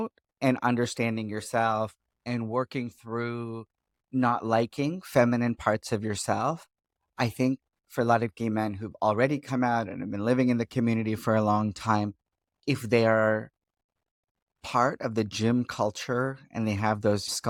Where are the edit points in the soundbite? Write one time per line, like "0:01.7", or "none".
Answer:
none